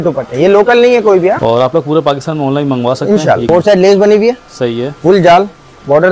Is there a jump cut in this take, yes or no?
yes